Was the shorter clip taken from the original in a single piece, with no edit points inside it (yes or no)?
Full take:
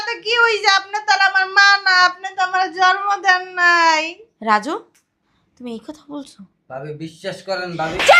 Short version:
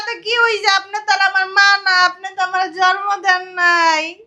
yes